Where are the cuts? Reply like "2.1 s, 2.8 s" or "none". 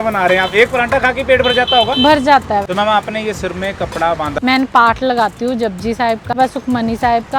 2.7 s, 4.3 s, 6.4 s

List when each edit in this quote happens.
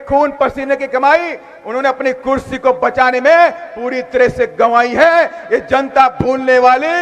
none

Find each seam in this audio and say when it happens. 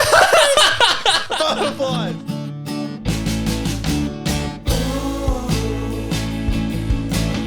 1.9 s

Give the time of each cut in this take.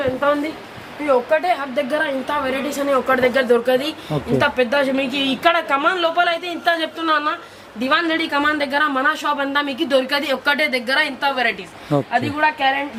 none

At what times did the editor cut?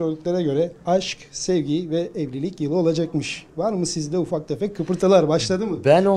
none

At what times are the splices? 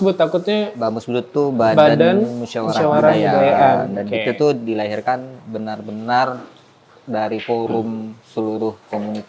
none

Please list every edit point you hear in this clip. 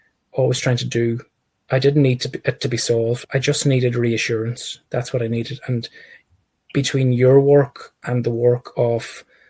3.2 s

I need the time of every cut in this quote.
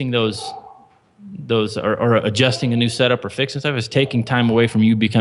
none

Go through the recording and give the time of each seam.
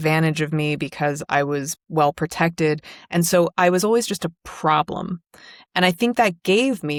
none

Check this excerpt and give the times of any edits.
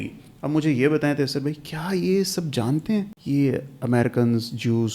3.2 s

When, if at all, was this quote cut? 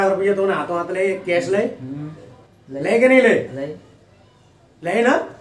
none

